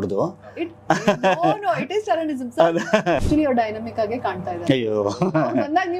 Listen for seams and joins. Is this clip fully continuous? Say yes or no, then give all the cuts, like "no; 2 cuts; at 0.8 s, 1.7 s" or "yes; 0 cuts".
no; 1 cut; at 3.2 s